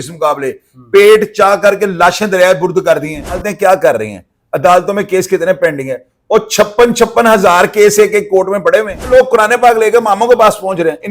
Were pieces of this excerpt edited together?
yes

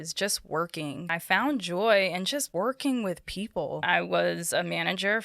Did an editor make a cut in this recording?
yes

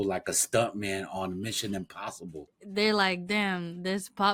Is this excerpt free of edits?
no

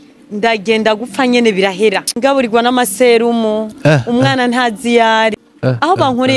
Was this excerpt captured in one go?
no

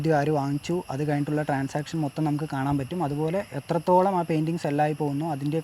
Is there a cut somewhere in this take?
no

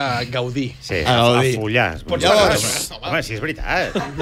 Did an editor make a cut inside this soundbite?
no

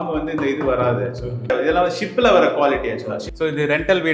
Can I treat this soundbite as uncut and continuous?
no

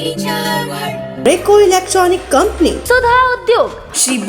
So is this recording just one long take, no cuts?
no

